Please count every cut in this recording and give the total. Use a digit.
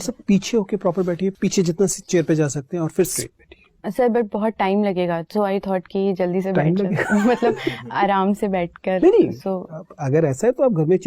2